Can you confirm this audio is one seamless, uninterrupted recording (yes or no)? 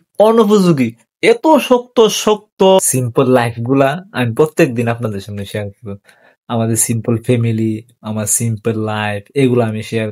no